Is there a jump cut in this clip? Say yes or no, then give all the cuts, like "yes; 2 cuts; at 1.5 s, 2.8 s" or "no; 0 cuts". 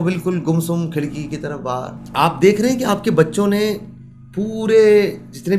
yes; 1 cut; at 2.0 s